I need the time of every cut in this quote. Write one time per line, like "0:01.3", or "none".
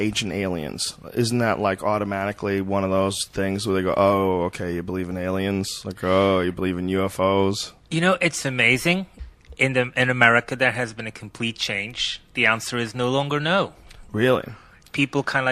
0:13.6